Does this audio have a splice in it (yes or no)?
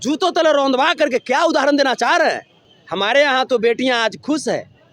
no